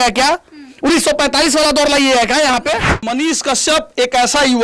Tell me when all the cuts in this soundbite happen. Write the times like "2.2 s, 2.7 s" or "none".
3.1 s